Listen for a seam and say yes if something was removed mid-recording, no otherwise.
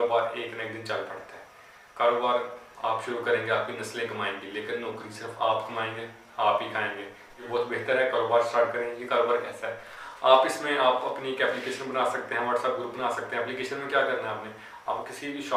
no